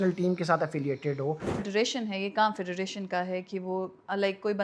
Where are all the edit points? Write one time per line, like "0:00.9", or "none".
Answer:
0:01.7